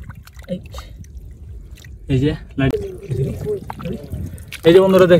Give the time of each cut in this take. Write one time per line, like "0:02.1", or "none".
0:02.7